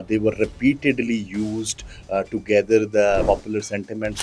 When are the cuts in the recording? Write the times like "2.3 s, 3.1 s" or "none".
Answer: 3.2 s